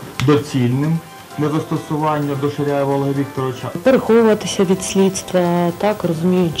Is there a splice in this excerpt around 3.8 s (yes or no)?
yes